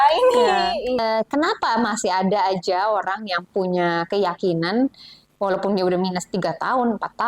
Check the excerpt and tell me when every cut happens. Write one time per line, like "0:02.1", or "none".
0:01.0